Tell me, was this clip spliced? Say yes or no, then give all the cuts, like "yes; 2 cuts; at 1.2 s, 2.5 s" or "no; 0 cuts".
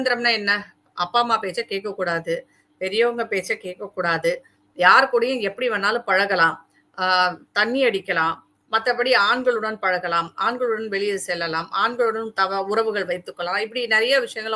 no; 0 cuts